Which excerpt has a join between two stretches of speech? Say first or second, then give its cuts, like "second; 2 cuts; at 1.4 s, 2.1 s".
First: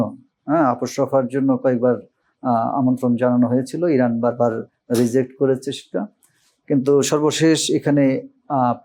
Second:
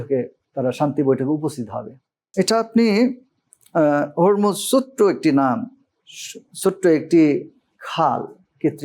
second; 1 cut; at 2.2 s